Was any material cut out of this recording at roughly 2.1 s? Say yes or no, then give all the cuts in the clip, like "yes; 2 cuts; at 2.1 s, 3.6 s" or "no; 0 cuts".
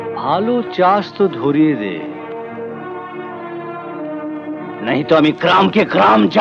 no; 0 cuts